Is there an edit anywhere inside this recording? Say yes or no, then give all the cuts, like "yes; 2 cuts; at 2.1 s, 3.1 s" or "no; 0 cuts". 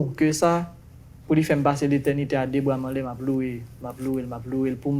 no; 0 cuts